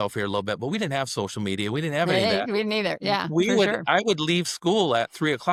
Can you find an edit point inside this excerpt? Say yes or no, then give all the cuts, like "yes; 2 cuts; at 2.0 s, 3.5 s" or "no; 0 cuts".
no; 0 cuts